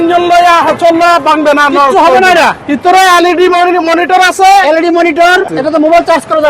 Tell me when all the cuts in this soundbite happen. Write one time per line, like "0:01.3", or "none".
0:02.8
0:05.5